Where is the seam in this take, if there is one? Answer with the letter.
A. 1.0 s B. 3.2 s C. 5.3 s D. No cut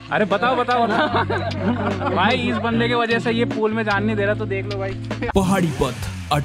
C